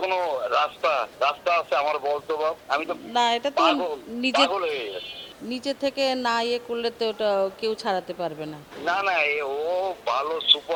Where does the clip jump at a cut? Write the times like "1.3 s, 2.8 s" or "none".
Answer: none